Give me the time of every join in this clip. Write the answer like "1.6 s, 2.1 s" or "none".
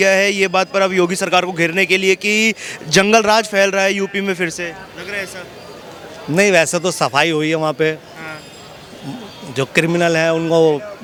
none